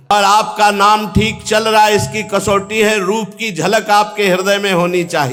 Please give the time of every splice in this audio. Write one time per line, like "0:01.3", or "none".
none